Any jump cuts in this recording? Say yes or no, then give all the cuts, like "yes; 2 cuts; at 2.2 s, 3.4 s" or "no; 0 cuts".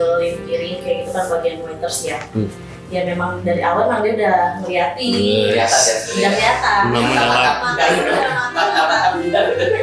no; 0 cuts